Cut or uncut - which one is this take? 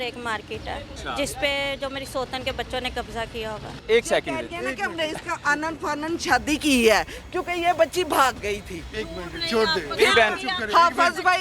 cut